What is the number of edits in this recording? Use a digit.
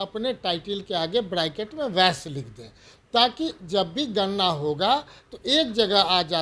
0